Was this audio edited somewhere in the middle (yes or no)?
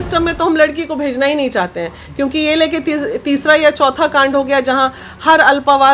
no